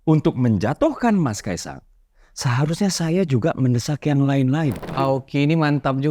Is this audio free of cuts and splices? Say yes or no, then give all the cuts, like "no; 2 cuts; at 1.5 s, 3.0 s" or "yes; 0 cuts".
no; 1 cut; at 4.8 s